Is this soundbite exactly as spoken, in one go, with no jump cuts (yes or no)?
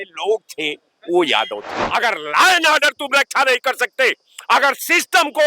no